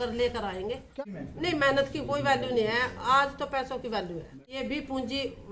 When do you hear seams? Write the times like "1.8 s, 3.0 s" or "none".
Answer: 1.1 s, 4.4 s